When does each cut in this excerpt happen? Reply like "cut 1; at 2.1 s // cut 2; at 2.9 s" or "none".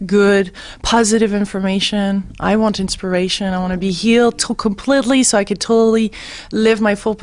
none